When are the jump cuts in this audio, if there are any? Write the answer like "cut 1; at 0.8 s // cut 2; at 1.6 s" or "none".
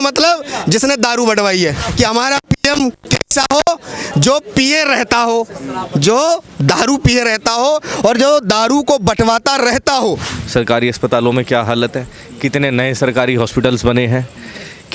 cut 1; at 1.9 s // cut 2; at 10.3 s